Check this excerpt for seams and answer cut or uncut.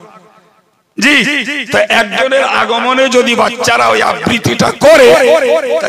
uncut